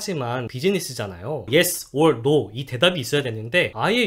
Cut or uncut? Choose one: cut